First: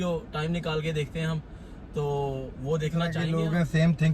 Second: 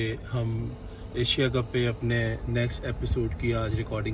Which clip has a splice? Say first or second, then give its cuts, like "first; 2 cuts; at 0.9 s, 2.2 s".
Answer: first; 1 cut; at 3.2 s